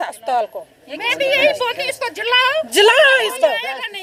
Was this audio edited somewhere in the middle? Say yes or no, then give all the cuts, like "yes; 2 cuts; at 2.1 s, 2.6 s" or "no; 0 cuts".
no; 0 cuts